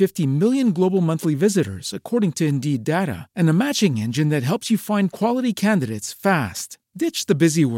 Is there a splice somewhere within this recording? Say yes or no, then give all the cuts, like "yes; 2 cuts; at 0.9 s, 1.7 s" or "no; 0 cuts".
no; 0 cuts